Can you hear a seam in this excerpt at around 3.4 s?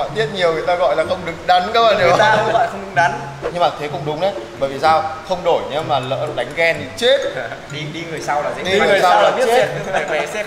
yes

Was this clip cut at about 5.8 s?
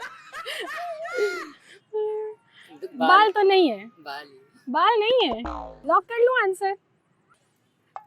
no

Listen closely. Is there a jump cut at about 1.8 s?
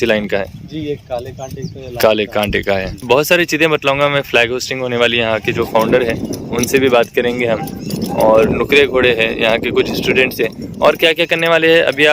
no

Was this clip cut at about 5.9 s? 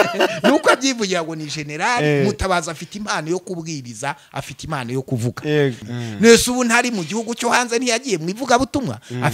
yes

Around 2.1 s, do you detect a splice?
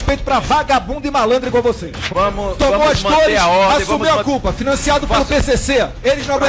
yes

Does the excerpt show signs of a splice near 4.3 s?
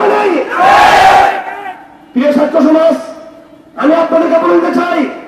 no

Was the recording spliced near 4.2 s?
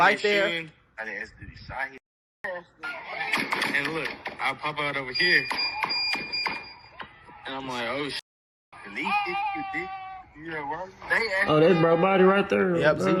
no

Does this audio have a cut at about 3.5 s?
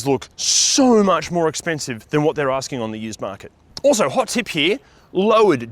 no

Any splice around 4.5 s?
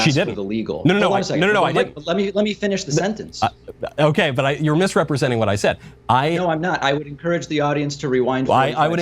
no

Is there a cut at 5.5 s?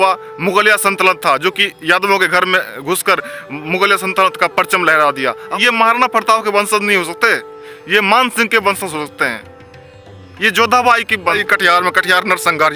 yes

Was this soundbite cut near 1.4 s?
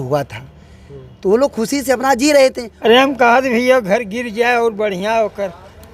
no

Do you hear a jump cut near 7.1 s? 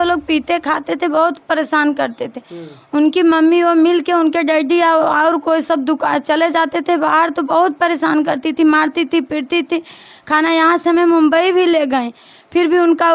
no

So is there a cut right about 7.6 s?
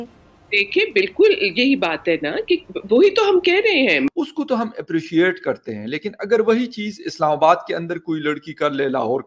no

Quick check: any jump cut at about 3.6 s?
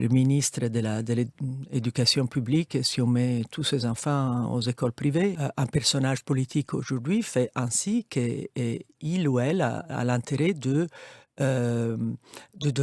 no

